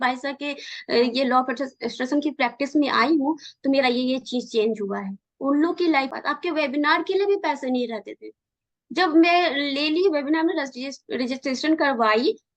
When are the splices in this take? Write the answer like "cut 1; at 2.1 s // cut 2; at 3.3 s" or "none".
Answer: cut 1; at 6.1 s

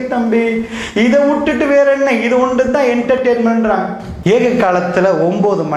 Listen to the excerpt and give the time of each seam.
cut 1; at 4.0 s

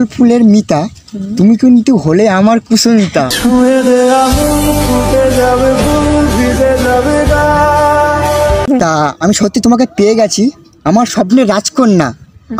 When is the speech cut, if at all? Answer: cut 1; at 8.8 s

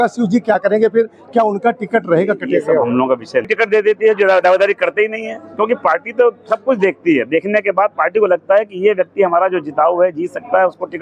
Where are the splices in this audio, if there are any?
cut 1; at 3.5 s

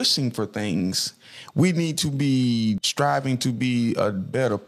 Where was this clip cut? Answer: cut 1; at 2.9 s

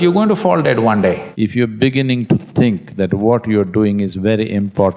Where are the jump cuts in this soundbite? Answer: cut 1; at 1.3 s

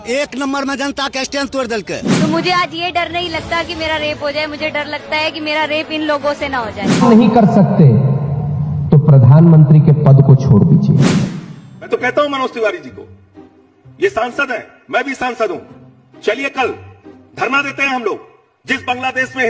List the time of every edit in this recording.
cut 1; at 2.1 s // cut 2; at 7.0 s // cut 3; at 11.2 s

